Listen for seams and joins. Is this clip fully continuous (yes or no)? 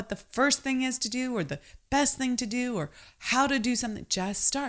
yes